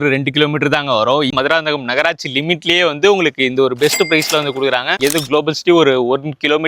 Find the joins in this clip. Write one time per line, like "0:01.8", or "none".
0:01.3
0:04.9